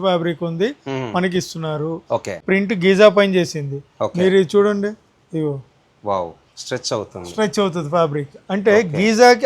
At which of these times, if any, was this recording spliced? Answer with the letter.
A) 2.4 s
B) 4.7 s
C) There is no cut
A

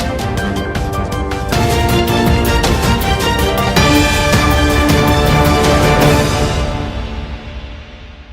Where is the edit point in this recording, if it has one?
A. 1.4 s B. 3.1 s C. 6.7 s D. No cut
A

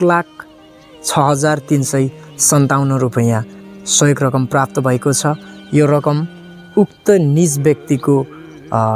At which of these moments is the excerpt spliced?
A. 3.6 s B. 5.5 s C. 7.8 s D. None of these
D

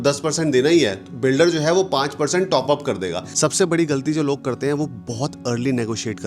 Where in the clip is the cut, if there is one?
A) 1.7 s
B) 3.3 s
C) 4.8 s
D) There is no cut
B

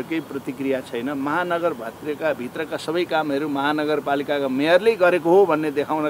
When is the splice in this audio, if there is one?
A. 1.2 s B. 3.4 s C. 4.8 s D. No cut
D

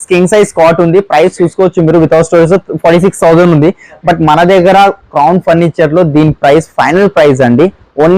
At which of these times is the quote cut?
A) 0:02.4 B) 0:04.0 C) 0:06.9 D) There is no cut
D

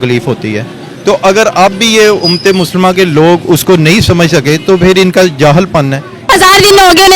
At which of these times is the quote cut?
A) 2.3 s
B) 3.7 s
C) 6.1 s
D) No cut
C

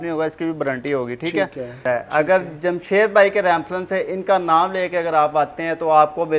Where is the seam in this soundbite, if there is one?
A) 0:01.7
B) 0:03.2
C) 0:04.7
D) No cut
A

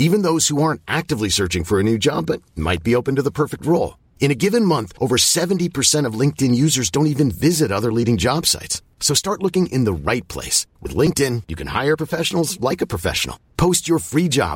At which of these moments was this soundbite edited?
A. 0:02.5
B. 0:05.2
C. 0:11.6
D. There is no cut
D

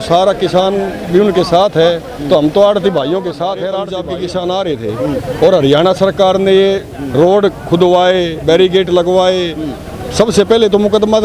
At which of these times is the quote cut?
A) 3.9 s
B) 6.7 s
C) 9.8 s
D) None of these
A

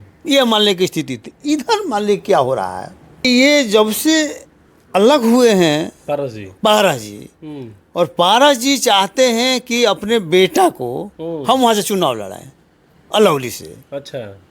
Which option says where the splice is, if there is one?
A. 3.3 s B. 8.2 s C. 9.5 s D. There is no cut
A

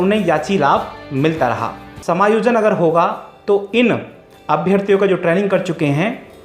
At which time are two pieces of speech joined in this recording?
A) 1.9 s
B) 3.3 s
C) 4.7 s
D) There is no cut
A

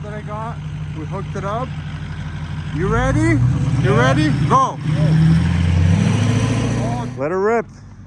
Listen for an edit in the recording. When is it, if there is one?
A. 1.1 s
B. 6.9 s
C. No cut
B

